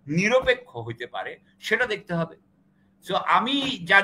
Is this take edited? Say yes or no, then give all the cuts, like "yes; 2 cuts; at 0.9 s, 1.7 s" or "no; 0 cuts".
no; 0 cuts